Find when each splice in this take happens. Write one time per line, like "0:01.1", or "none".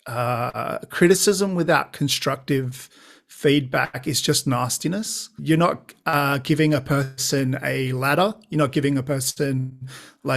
0:05.4